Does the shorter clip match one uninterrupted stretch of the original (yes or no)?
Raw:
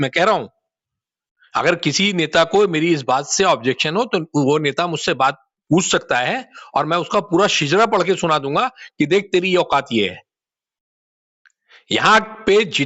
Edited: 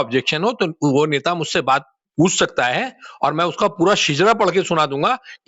yes